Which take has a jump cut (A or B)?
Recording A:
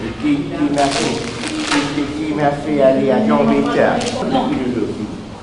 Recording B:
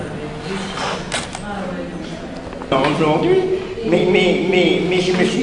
A